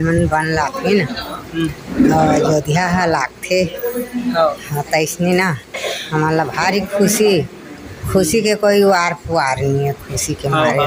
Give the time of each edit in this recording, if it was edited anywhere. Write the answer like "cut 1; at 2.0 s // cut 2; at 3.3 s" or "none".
none